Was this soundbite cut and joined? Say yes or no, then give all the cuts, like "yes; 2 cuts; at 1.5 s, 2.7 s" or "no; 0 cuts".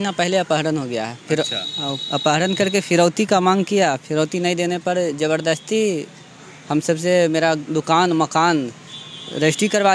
no; 0 cuts